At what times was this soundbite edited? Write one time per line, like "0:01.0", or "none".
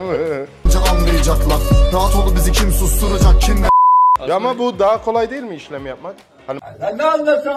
0:04.2